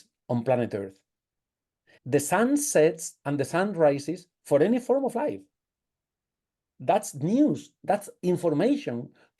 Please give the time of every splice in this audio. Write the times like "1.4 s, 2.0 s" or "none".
1.9 s